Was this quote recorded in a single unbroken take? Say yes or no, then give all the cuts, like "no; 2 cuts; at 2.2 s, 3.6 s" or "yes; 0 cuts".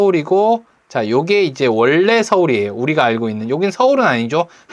yes; 0 cuts